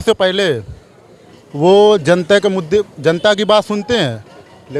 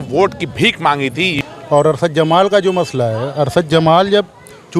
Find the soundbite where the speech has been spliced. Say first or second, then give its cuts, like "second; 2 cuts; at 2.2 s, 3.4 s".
second; 1 cut; at 1.4 s